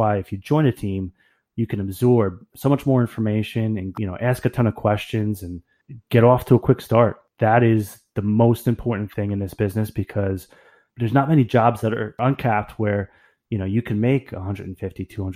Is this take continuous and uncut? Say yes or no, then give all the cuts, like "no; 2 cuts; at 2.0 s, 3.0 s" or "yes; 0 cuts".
no; 3 cuts; at 3.9 s, 7.2 s, 10.8 s